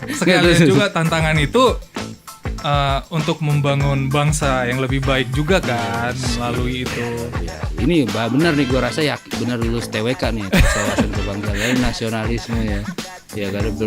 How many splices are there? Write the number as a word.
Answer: one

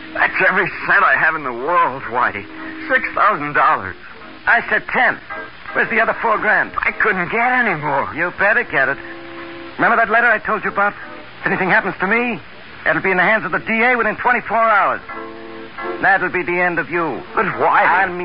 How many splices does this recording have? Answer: one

